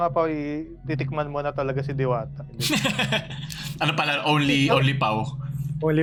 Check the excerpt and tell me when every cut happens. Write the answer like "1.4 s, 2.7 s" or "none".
none